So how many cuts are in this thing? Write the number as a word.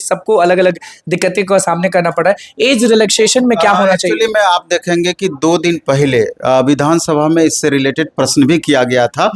zero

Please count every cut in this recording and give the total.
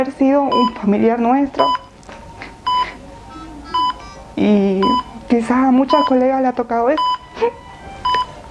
zero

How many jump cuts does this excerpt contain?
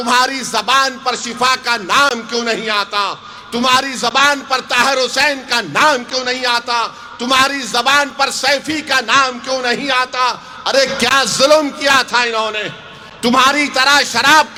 zero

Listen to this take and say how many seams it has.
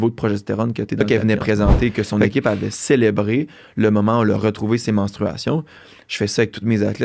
one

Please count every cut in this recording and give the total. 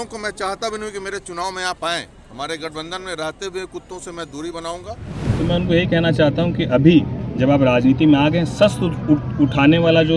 one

